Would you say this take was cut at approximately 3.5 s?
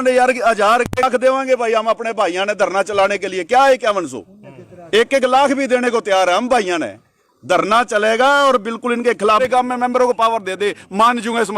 no; 2 cuts; at 1.0 s, 9.4 s

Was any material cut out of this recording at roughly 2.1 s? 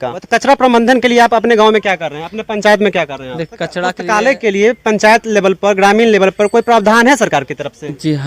no; 1 cut; at 4.0 s

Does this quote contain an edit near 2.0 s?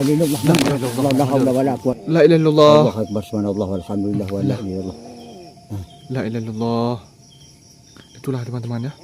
yes; 1 cut; at 2.0 s

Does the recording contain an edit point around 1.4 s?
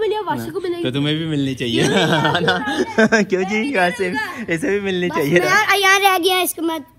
no; 0 cuts

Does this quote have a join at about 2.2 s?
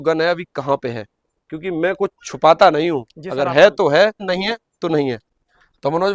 no; 2 cuts; at 4.2 s, 5.2 s

